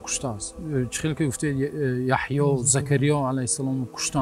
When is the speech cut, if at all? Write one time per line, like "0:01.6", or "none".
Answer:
none